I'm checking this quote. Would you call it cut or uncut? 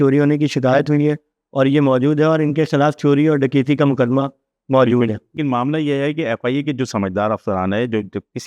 cut